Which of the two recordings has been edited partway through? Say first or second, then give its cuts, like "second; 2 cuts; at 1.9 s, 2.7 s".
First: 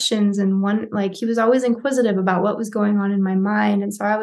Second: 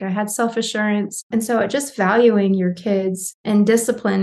second; 2 cuts; at 1.3 s, 3.4 s